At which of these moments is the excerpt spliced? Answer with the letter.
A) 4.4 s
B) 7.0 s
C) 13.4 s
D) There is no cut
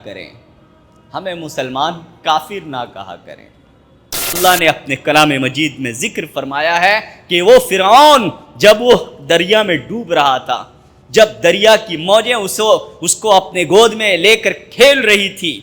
A